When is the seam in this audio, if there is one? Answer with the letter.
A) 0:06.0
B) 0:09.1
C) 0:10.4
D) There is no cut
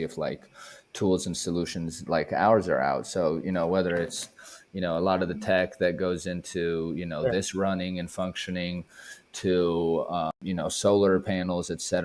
C